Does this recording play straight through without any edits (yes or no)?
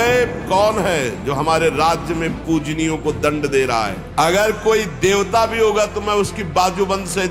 no